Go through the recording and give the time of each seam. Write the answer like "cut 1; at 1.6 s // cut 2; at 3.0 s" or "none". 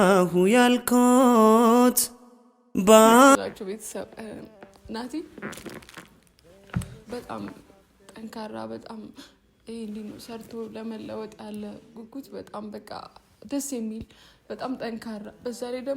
cut 1; at 3.4 s